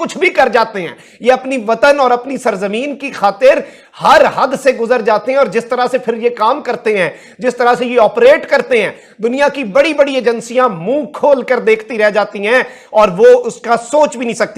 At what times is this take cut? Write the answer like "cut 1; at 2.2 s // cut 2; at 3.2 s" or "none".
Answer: none